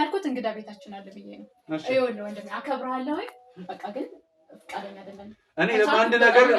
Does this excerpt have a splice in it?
no; 0 cuts

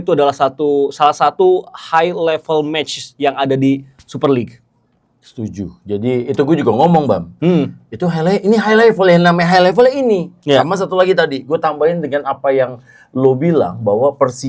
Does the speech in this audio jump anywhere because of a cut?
no; 0 cuts

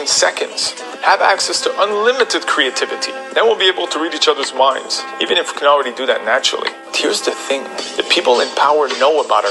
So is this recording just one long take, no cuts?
no; 1 cut; at 1.5 s

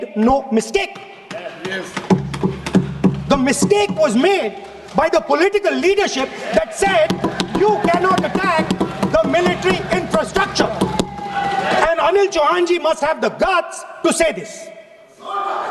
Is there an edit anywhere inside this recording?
no; 0 cuts

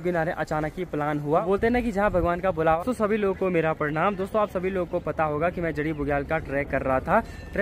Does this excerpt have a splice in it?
yes; 1 cut; at 2.8 s

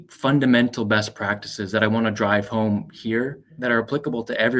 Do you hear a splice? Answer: yes; 1 cut; at 3.5 s

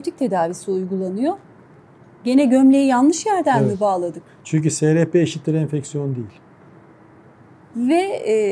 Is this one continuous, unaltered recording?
yes; 0 cuts

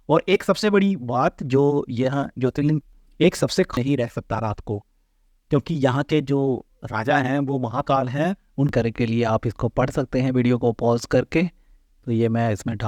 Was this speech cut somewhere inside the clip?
yes; 3 cuts; at 2.8 s, 3.8 s, 8.7 s

